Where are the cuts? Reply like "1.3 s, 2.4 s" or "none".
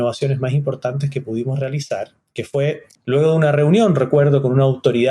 2.9 s